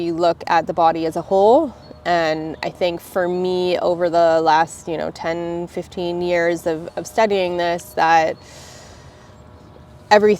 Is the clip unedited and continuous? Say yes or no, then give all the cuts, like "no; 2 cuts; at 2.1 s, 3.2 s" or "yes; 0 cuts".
yes; 0 cuts